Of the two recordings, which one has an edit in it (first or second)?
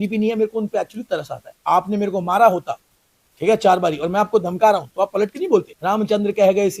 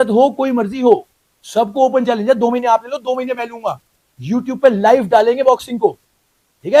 first